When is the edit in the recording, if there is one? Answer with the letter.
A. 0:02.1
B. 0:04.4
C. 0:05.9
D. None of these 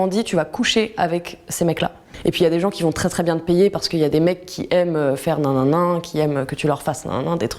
A